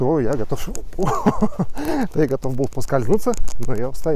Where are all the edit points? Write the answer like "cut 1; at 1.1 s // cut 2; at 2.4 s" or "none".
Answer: none